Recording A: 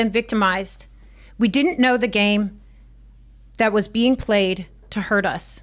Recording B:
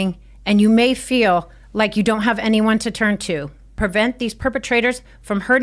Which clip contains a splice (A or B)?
B